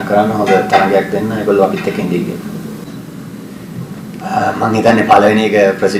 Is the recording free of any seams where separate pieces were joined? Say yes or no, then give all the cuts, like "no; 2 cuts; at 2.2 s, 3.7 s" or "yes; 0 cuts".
no; 1 cut; at 2.8 s